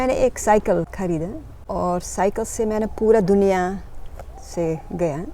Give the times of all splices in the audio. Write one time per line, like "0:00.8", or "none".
0:00.9